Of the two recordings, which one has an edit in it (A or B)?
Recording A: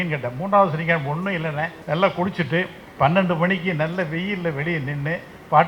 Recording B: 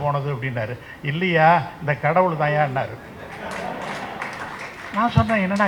A